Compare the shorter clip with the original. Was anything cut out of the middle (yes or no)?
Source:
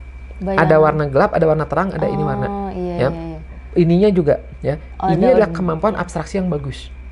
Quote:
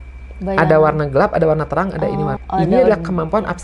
yes